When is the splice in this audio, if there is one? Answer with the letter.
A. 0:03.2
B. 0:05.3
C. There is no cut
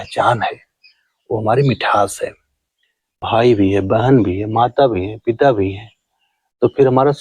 A